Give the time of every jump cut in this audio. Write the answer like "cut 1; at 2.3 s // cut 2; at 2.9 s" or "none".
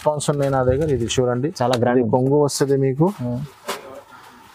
none